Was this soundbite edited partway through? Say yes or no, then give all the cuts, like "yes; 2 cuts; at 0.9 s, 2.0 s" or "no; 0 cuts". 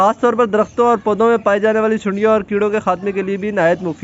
no; 0 cuts